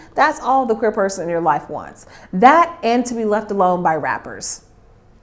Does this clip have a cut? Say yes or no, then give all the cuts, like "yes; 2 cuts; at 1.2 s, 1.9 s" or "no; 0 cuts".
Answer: no; 0 cuts